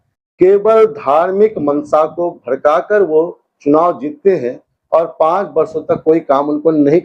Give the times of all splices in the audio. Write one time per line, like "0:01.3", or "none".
none